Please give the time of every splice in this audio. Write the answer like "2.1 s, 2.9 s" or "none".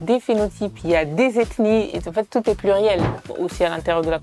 3.2 s